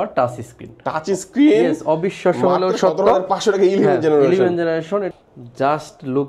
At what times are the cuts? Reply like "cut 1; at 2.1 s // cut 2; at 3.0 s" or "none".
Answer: cut 1; at 5.1 s